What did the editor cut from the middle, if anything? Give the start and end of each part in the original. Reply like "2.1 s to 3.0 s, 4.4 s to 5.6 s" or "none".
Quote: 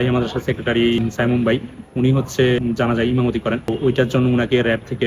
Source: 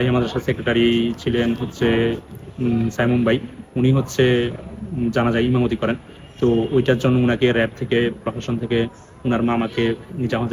1.0 s to 2.8 s, 4.4 s to 5.0 s, 6.1 s to 6.6 s